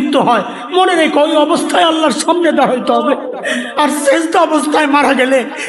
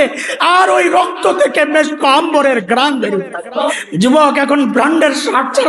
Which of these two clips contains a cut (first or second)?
second